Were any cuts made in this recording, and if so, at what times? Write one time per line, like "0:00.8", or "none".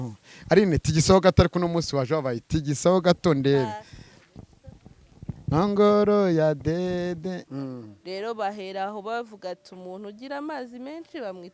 0:07.5